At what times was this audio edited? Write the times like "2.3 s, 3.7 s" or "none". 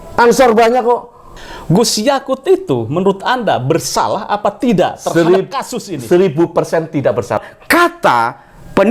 1.3 s, 7.5 s